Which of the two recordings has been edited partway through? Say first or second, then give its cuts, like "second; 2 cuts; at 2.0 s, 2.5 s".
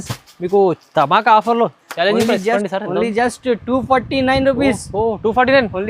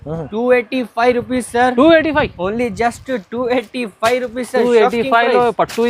first; 1 cut; at 2.6 s